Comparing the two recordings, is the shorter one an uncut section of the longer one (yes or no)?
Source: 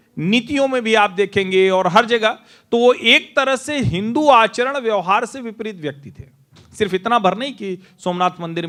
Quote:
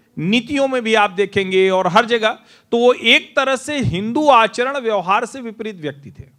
yes